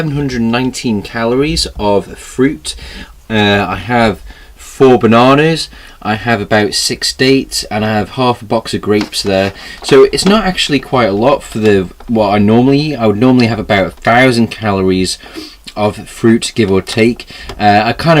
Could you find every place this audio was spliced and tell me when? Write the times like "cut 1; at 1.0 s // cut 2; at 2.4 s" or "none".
cut 1; at 1.1 s